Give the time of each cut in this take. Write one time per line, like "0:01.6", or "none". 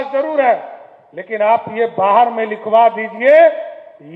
none